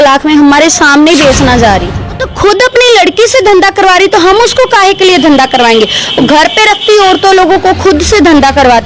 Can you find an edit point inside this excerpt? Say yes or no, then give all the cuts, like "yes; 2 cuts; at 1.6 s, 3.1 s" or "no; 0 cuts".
yes; 1 cut; at 2.3 s